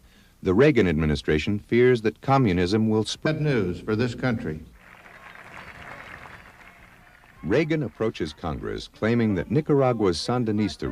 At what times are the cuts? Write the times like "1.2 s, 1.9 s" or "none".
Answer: none